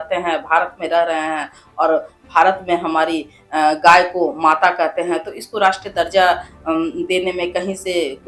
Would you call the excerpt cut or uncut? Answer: uncut